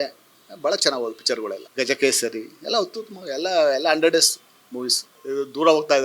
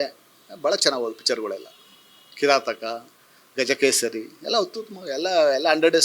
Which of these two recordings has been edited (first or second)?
first